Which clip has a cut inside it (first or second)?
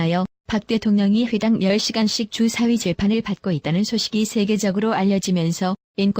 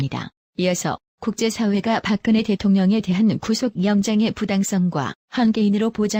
first